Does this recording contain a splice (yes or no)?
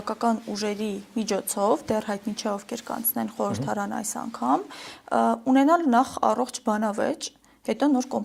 no